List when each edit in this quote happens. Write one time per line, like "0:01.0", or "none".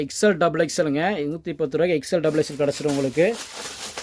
none